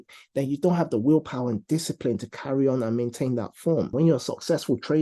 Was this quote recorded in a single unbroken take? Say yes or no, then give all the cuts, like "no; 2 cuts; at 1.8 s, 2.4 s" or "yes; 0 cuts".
no; 1 cut; at 3.9 s